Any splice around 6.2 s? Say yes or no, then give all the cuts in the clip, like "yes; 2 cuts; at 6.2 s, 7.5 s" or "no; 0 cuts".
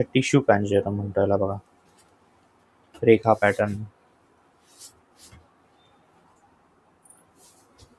no; 0 cuts